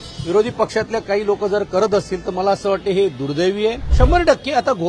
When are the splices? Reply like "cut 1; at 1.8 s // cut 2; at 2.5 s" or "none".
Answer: cut 1; at 3.9 s